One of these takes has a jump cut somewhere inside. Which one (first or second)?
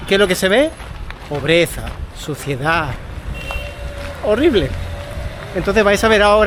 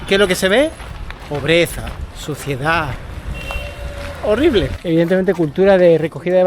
second